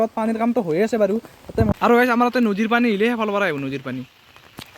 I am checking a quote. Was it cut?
yes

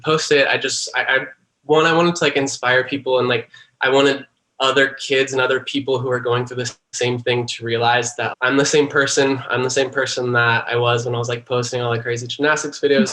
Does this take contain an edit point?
yes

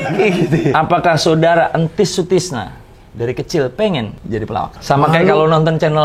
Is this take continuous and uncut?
no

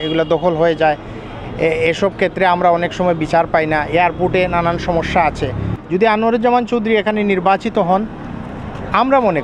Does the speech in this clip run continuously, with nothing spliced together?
yes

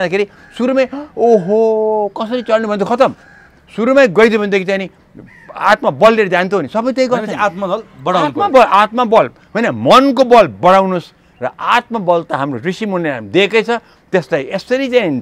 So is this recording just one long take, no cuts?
yes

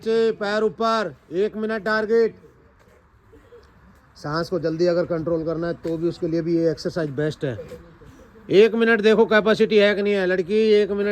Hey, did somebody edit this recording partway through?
no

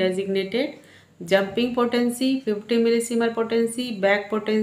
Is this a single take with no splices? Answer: yes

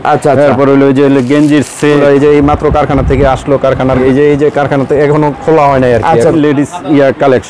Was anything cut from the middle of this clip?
yes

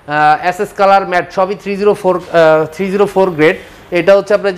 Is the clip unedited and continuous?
yes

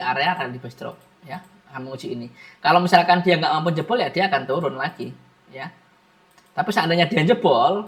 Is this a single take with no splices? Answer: yes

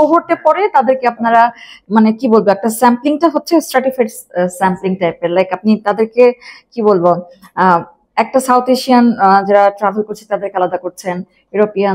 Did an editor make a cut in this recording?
no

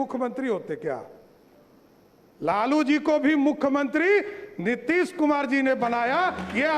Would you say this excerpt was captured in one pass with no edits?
yes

